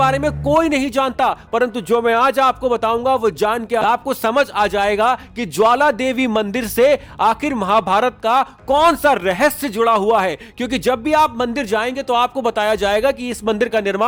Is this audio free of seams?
yes; 0 cuts

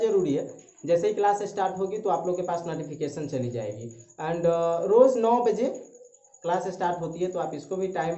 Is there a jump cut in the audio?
no; 0 cuts

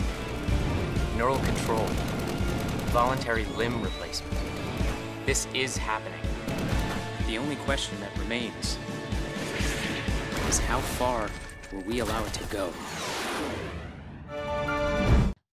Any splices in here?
yes; 1 cut; at 6.2 s

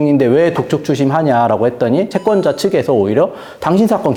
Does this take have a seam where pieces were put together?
no; 0 cuts

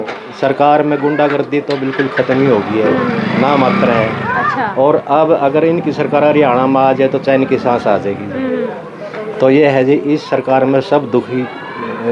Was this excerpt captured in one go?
yes; 0 cuts

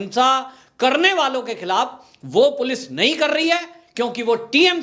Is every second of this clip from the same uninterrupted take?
yes; 0 cuts

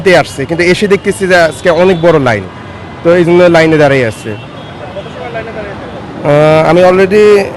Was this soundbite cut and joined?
no; 0 cuts

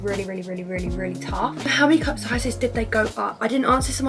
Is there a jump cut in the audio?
yes; 1 cut; at 1.7 s

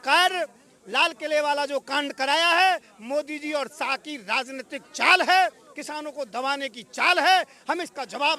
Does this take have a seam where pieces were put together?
no; 0 cuts

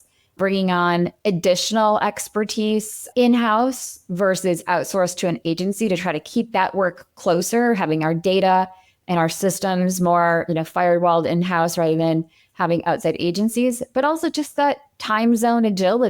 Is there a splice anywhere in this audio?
no; 0 cuts

